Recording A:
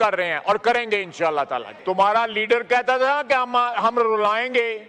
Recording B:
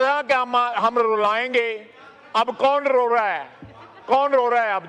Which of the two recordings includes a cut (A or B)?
A